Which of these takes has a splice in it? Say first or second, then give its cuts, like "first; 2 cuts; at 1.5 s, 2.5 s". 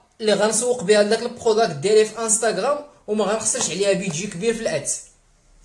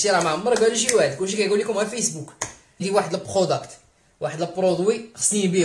second; 1 cut; at 2.8 s